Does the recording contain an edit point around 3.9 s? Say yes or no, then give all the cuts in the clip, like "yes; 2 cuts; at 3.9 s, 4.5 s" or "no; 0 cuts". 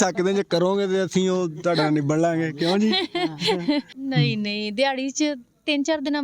yes; 1 cut; at 3.9 s